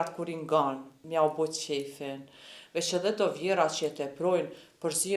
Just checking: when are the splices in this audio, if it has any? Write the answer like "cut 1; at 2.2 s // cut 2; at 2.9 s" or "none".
cut 1; at 0.9 s